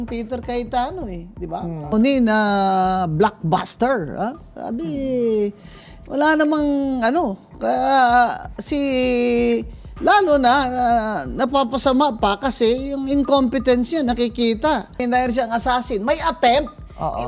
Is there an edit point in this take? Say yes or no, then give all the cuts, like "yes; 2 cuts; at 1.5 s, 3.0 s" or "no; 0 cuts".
yes; 2 cuts; at 1.9 s, 15.0 s